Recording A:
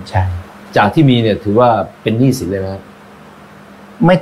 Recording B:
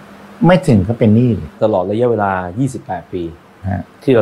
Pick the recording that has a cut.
B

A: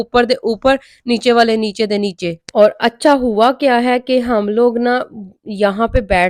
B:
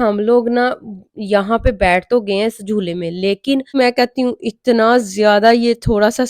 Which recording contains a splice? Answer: B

